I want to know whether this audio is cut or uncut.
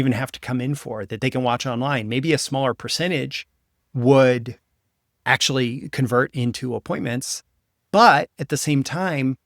uncut